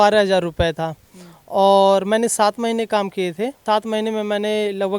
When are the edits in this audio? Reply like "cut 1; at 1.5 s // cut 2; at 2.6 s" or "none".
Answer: cut 1; at 3.6 s

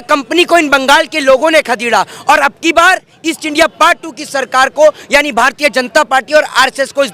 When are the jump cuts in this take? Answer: none

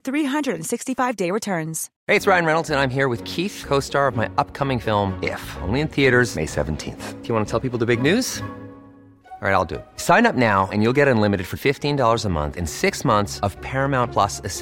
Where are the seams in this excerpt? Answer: cut 1; at 1.9 s

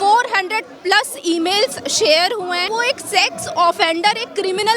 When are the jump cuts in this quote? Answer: cut 1; at 2.7 s

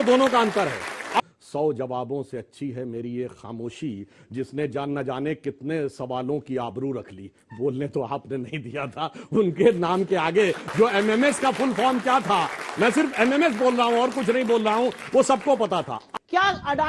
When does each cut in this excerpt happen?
cut 1; at 1.2 s // cut 2; at 16.0 s

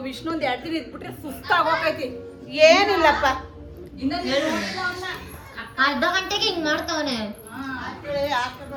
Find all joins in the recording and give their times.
none

